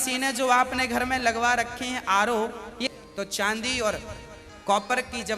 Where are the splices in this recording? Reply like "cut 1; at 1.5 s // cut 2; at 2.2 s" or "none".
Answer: cut 1; at 2.9 s

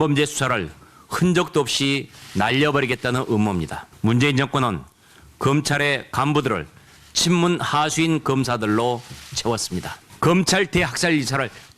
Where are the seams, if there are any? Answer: cut 1; at 3.8 s // cut 2; at 10.0 s

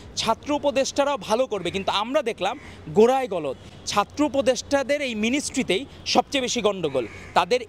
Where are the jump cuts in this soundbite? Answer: none

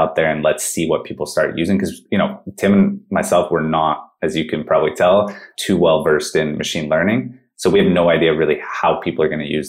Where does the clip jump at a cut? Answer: none

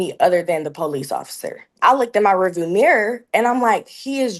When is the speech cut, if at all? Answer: cut 1; at 1.7 s

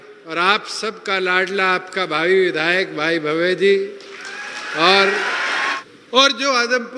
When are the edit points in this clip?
cut 1; at 5.7 s

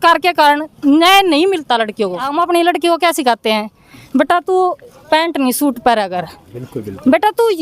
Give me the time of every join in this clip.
cut 1; at 2.3 s

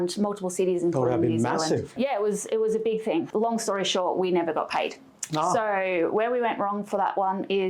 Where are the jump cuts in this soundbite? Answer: cut 1; at 1.9 s // cut 2; at 3.3 s

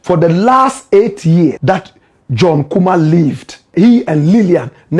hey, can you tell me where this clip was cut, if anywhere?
cut 1; at 1.6 s // cut 2; at 3.6 s

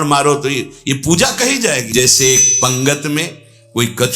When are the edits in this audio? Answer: cut 1; at 1.9 s

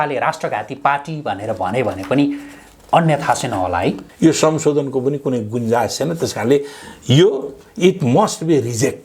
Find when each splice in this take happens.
cut 1; at 4.1 s

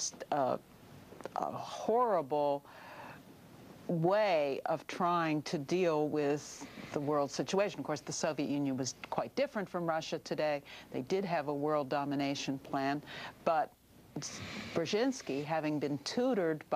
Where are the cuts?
none

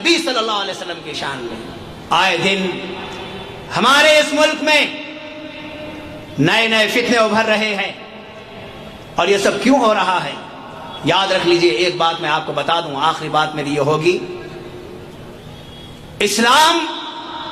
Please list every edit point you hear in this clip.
cut 1; at 1.9 s

